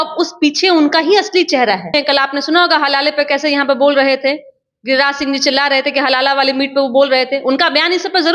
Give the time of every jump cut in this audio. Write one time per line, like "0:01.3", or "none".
0:01.9